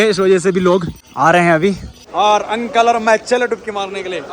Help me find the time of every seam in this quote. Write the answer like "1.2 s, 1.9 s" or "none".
1.0 s, 1.9 s